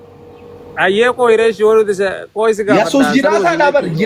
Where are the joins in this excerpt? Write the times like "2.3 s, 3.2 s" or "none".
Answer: none